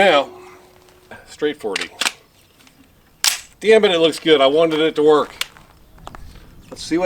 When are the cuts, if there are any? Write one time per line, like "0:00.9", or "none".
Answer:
0:01.2